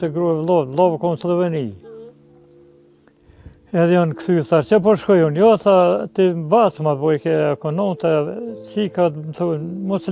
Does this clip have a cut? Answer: no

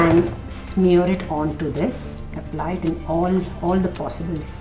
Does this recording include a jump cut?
no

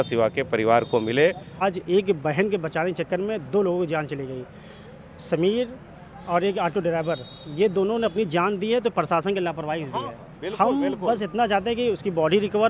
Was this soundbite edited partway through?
yes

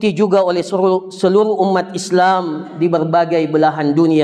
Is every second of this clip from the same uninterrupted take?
yes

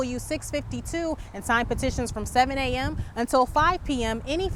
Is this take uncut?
yes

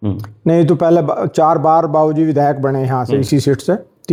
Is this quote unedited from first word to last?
yes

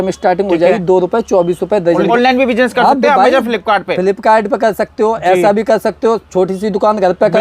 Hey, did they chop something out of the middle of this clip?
yes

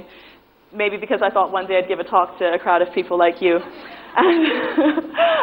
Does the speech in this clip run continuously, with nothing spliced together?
yes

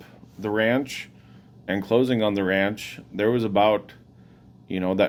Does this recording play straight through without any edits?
yes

